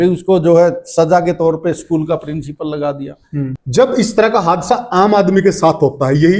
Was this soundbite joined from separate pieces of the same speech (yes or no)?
yes